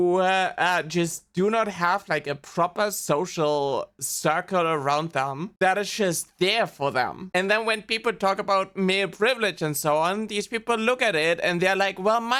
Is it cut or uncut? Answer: uncut